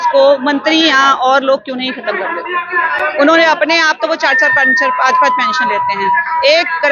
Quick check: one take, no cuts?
yes; 0 cuts

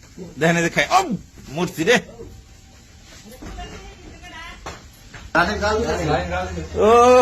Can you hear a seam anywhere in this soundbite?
no; 0 cuts

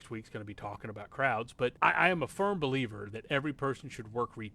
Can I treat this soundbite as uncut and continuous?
no; 1 cut; at 1.8 s

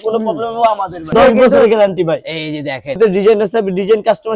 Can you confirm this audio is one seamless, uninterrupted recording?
no; 2 cuts; at 1.1 s, 3.0 s

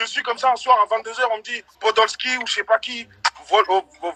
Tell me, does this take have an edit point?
no; 0 cuts

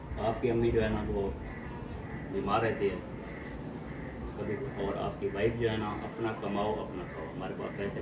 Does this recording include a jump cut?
yes; 1 cut; at 4.6 s

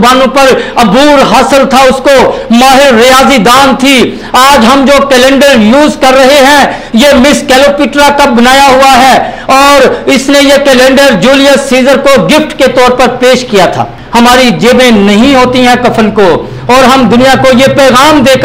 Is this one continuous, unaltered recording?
no; 1 cut; at 14.0 s

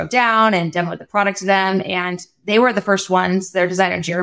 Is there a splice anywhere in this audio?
no; 0 cuts

